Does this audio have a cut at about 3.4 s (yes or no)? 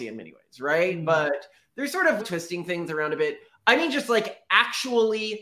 no